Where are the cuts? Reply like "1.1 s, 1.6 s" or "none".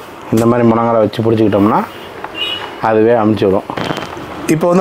3.8 s